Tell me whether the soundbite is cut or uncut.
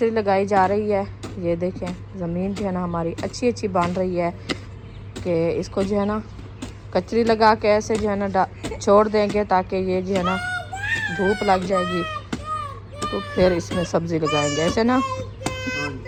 uncut